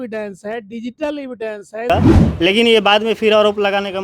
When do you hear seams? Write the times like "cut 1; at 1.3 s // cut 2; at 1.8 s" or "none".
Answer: cut 1; at 1.9 s